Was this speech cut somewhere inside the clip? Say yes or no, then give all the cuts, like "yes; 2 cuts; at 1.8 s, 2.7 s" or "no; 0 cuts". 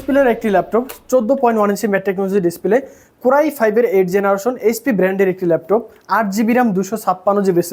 no; 0 cuts